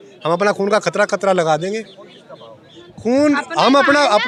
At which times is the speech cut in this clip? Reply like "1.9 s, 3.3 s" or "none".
none

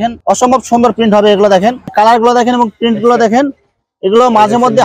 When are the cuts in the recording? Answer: 1.9 s

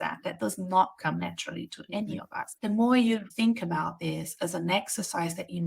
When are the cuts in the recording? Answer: 2.5 s, 3.3 s

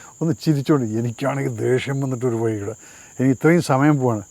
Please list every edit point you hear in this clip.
none

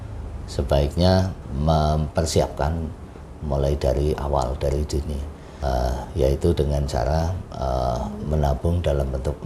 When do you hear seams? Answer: 1.4 s, 5.4 s

